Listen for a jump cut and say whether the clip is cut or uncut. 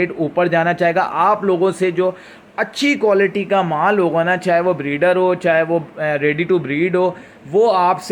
uncut